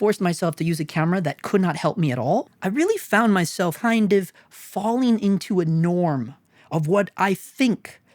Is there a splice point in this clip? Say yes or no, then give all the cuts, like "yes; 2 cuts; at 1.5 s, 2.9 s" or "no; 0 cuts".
yes; 1 cut; at 2.5 s